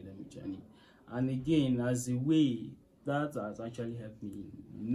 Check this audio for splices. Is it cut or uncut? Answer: uncut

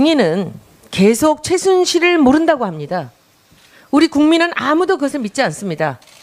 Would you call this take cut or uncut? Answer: uncut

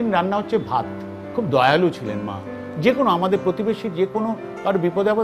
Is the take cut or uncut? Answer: cut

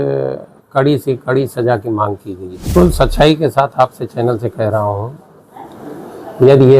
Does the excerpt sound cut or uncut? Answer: cut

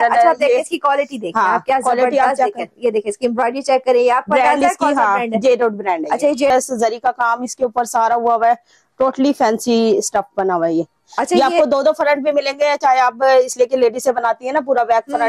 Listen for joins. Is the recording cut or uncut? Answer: cut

